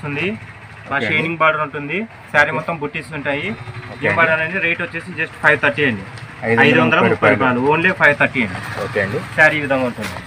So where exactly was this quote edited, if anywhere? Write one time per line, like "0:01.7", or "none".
none